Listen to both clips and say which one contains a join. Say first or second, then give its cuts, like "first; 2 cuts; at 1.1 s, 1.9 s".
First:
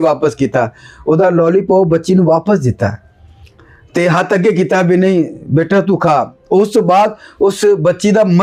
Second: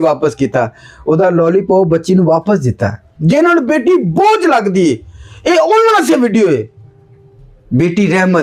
second; 1 cut; at 3.1 s